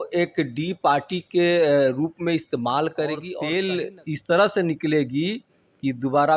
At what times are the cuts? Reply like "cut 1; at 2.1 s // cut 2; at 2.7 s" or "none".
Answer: cut 1; at 3.3 s